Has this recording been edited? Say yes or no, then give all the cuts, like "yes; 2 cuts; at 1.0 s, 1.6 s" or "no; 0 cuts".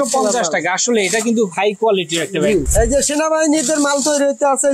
yes; 1 cut; at 2.7 s